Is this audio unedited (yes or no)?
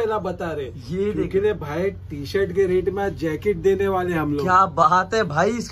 yes